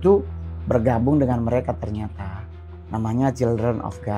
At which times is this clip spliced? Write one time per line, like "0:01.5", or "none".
none

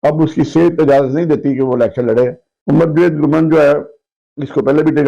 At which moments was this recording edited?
0:02.5

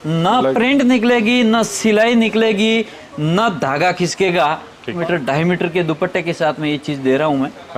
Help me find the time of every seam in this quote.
0:05.0

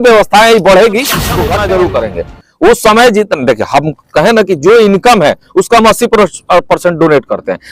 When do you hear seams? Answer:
0:01.4

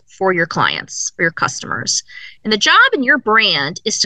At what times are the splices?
none

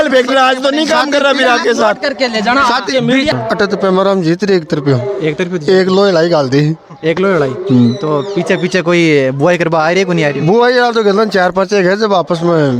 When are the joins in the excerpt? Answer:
0:03.3

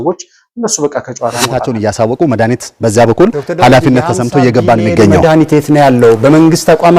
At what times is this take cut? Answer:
0:01.5

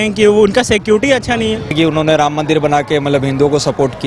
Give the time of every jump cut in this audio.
0:01.7

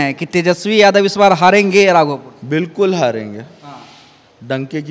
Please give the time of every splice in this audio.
none

